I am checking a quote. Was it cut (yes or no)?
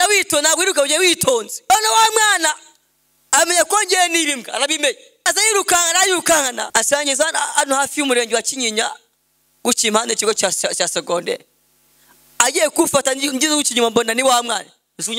yes